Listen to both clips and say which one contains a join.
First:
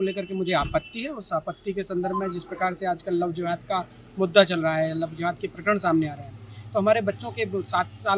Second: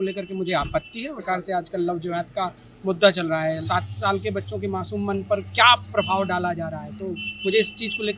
second; 2 cuts; at 1.2 s, 3.6 s

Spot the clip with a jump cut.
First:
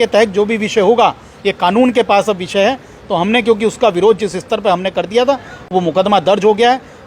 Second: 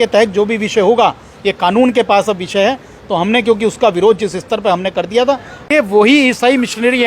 second; 1 cut; at 5.5 s

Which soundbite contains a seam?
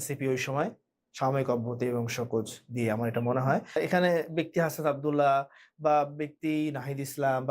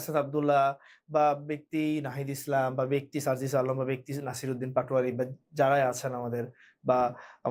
first; 1 cut; at 3.8 s

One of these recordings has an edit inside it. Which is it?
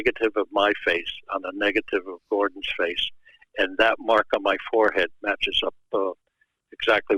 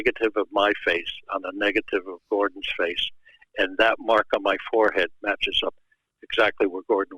second; 1 cut; at 5.8 s

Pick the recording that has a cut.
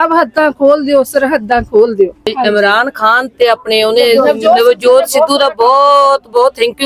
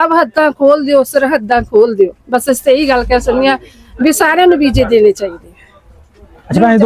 first; 1 cut; at 2.3 s

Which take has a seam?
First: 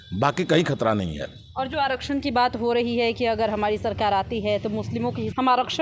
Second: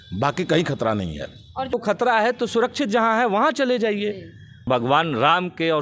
second; 2 cuts; at 1.7 s, 4.7 s

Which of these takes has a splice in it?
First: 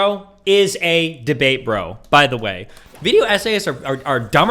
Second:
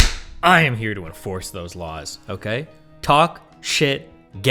first; 1 cut; at 2.7 s

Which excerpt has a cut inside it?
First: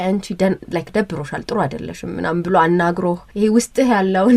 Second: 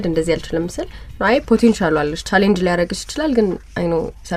first; 1 cut; at 3.2 s

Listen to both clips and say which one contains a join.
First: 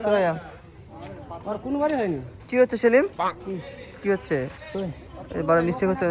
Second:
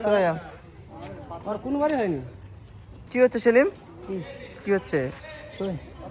first; 2 cuts; at 2.3 s, 4.6 s

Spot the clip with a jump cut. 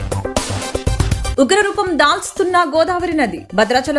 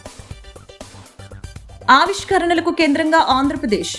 first; 1 cut; at 1.3 s

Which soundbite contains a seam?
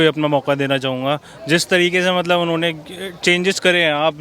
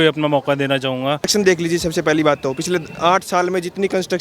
second; 1 cut; at 1.3 s

